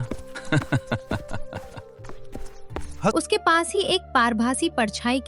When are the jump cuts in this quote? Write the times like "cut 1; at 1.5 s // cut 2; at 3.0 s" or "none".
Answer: cut 1; at 3.1 s